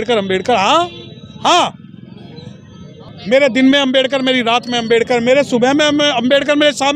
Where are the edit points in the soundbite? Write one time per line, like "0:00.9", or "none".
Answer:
none

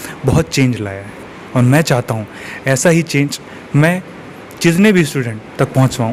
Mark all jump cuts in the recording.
none

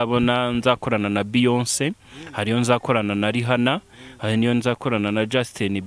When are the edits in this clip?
none

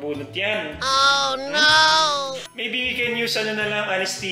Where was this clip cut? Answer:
0:02.4

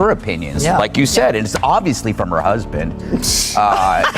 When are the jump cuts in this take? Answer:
none

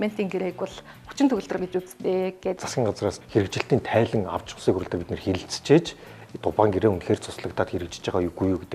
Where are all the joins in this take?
0:02.6

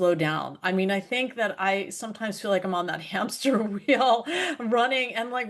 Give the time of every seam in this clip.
none

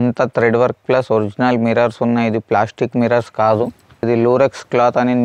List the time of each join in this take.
0:04.0

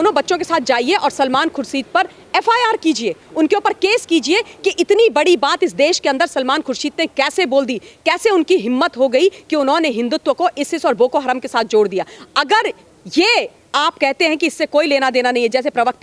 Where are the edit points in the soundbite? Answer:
none

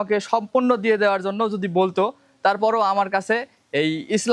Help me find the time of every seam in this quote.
none

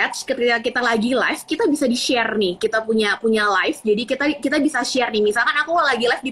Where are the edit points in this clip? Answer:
none

